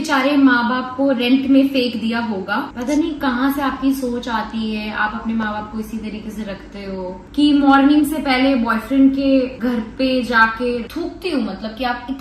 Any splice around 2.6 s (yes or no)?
yes